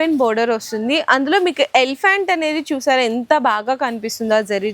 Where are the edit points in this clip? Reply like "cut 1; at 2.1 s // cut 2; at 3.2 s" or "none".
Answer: none